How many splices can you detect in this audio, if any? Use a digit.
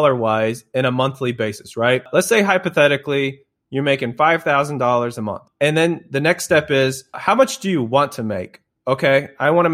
3